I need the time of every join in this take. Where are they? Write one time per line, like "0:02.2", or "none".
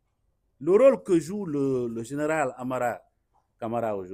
none